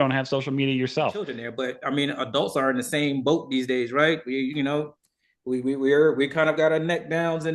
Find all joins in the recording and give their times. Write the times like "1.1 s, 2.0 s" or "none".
1.4 s